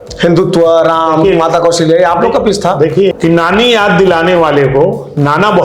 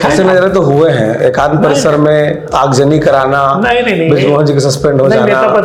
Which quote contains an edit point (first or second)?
first